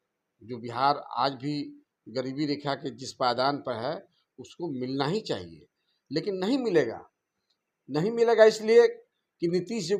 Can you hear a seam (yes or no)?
no